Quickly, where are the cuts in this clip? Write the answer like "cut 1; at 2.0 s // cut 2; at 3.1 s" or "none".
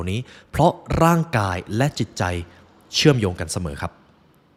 none